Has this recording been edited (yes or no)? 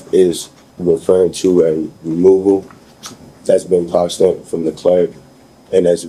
no